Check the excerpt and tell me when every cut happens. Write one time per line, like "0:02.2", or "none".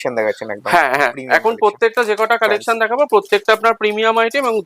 none